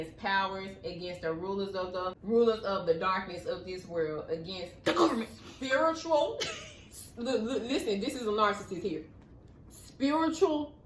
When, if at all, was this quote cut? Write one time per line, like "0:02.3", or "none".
0:02.2

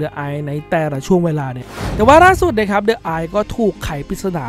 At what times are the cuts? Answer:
0:01.6

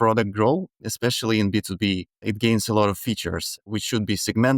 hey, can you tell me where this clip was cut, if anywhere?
0:00.8
0:02.3
0:03.7

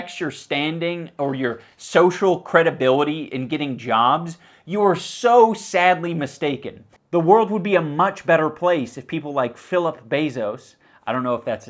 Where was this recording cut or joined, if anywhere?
0:06.8

